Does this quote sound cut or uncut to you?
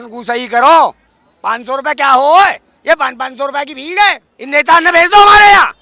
uncut